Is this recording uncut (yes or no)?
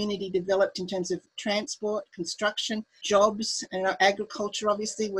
no